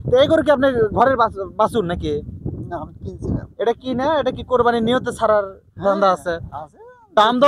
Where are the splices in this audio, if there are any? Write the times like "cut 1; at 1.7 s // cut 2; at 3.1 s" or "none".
none